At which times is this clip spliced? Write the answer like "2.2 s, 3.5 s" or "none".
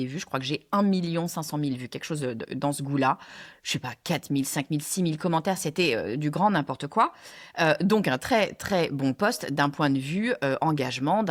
none